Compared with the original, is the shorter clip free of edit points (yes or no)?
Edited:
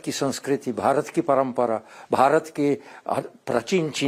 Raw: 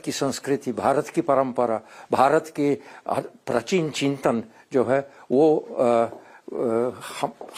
yes